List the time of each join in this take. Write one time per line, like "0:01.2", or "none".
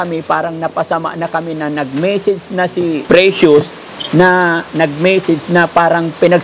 0:03.0